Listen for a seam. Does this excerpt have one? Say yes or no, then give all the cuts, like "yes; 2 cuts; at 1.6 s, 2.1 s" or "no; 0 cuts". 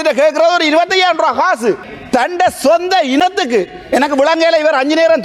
yes; 1 cut; at 1.9 s